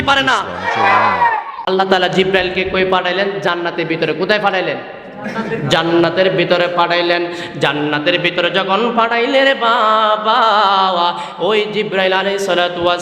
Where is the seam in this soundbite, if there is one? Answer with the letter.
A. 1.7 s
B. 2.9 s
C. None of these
A